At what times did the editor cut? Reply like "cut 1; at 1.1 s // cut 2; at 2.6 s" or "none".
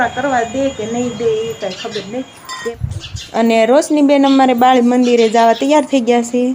cut 1; at 2.7 s